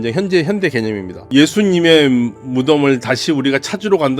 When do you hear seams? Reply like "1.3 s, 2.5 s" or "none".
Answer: 1.3 s